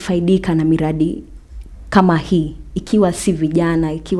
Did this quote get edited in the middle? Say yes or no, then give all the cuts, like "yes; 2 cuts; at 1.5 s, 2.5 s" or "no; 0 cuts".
no; 0 cuts